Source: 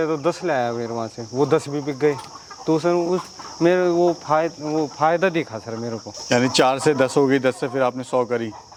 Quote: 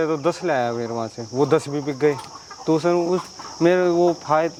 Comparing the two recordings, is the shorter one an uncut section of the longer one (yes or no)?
yes